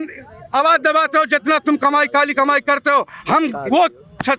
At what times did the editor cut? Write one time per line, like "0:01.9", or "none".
none